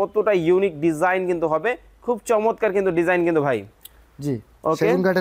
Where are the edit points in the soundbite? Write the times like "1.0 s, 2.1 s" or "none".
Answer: none